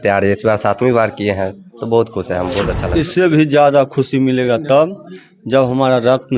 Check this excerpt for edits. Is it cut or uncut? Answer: cut